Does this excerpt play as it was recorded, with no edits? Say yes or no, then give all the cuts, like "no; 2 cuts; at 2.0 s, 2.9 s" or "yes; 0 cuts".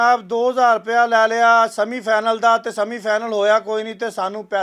yes; 0 cuts